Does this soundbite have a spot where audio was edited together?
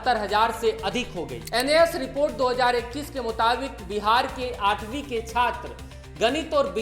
yes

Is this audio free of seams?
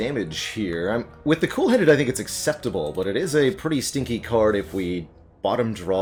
yes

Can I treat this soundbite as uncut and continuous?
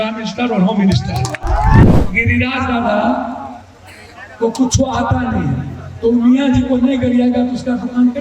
no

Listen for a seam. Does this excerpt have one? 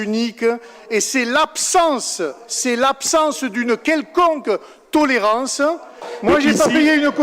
yes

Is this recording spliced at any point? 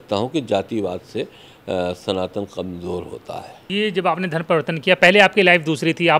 yes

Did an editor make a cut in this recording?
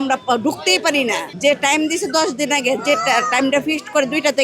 yes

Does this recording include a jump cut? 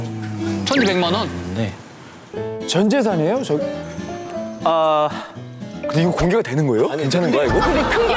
no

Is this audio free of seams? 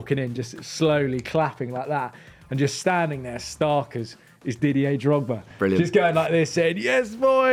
yes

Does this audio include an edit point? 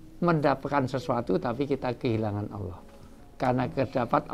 no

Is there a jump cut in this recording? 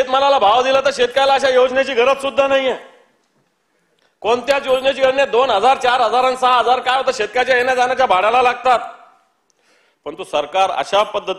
no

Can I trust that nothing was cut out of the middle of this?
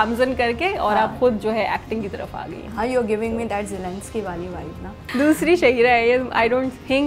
no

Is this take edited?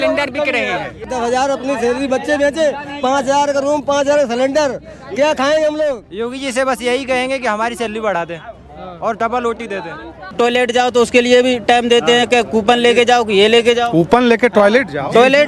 yes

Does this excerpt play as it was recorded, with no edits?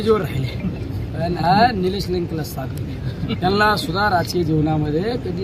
yes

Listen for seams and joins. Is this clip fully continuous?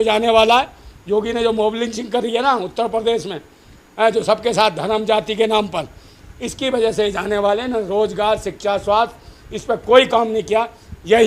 yes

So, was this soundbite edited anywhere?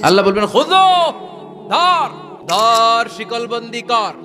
yes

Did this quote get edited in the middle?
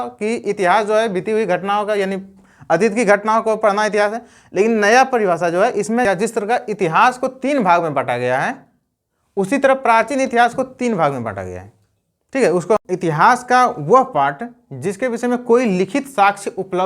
yes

